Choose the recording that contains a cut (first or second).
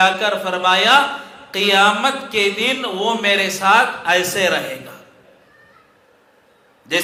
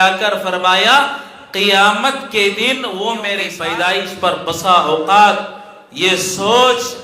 second